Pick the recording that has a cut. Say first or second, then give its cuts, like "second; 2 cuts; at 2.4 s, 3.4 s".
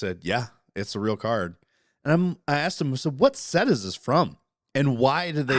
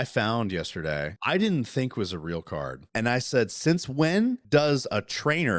second; 3 cuts; at 1.1 s, 2.8 s, 4.4 s